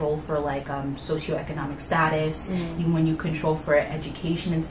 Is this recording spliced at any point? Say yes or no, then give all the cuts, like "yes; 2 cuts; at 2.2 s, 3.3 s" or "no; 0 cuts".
no; 0 cuts